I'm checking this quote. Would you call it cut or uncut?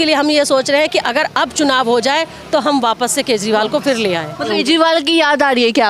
uncut